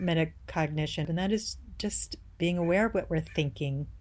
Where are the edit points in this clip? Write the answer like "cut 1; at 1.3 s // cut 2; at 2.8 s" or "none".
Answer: cut 1; at 1.1 s